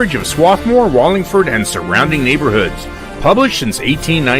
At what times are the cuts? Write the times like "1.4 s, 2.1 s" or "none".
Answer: none